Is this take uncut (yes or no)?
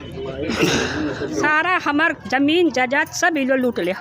no